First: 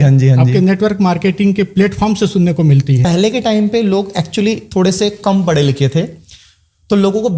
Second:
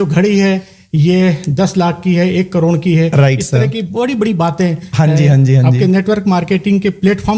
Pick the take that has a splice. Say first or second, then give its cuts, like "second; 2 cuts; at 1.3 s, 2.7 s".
first; 1 cut; at 3.1 s